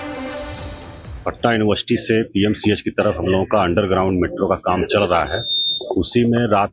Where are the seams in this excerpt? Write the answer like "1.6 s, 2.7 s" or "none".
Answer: none